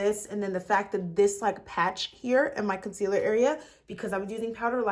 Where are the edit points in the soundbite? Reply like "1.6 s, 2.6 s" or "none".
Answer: none